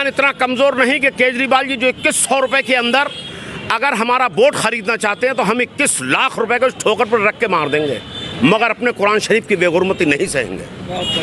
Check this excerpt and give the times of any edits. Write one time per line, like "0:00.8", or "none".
none